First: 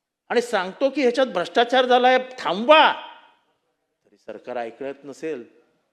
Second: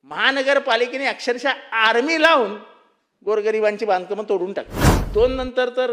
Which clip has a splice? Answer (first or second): second